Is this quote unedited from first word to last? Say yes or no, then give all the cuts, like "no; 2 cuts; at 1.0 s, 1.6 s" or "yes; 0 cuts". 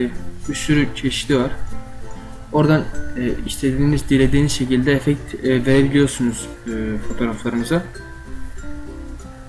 no; 1 cut; at 5.3 s